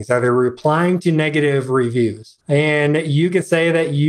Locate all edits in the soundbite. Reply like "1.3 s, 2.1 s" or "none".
2.3 s